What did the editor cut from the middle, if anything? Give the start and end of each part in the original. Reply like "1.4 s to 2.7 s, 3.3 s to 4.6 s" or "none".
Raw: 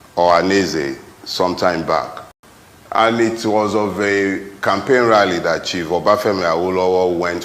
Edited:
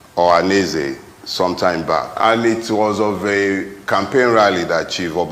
2.1 s to 2.9 s